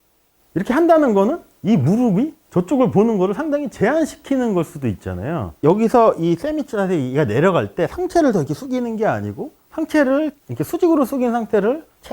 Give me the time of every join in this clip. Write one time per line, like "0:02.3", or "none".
0:05.5